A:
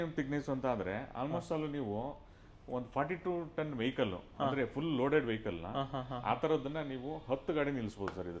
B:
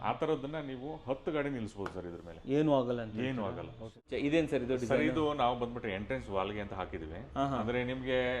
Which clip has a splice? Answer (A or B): B